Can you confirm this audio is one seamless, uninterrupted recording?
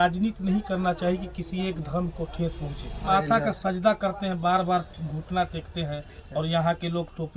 no; 1 cut; at 3.0 s

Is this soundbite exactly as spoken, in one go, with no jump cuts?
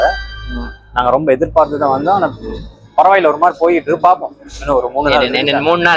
yes; 0 cuts

